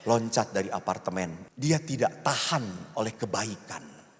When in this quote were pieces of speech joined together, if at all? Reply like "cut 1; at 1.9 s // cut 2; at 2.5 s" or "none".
cut 1; at 1.4 s